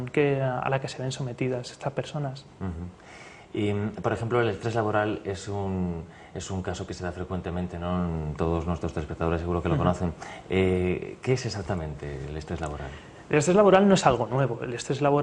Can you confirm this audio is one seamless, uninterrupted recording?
no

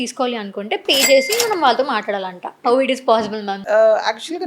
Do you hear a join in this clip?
yes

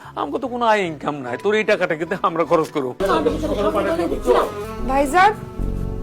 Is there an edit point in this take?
yes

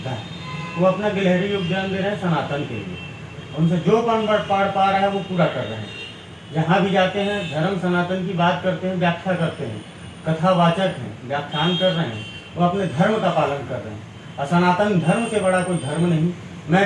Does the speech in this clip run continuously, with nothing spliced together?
yes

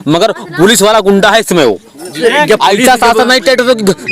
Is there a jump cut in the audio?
yes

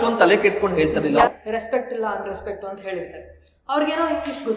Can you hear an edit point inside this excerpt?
yes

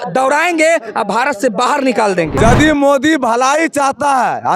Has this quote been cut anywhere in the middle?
yes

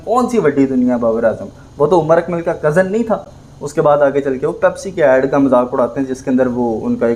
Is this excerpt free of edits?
yes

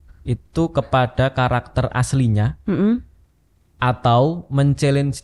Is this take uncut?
yes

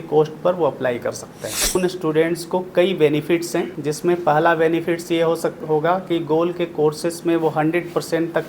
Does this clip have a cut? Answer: yes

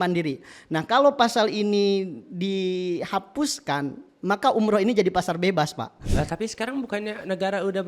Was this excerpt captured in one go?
no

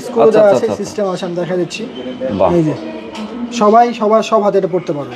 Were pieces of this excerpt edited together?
no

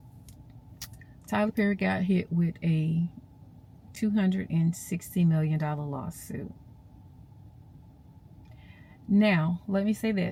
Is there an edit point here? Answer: no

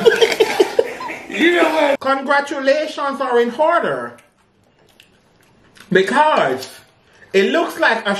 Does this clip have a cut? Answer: yes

